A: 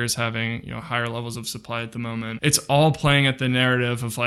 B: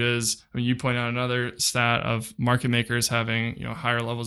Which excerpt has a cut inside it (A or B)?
A